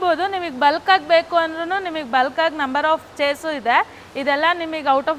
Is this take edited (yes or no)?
no